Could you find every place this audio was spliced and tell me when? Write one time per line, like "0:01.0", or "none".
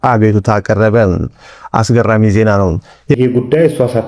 0:03.2